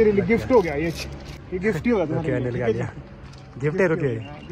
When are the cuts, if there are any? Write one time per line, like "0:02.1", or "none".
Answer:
0:01.3